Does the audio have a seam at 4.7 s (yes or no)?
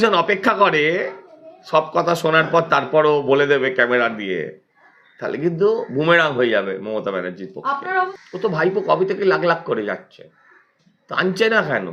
no